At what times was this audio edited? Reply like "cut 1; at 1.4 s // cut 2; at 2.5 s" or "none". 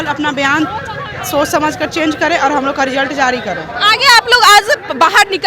none